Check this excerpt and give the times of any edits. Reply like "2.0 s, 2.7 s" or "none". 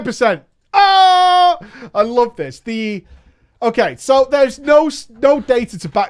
none